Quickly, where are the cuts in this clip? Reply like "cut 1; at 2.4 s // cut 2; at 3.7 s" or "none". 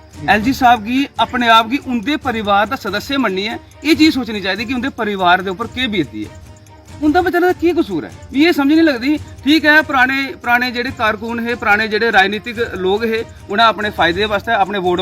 cut 1; at 6.9 s